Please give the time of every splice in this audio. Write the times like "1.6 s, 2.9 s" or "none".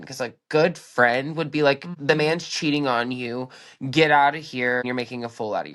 1.9 s, 4.8 s